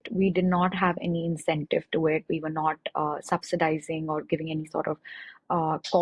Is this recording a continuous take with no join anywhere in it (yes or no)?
yes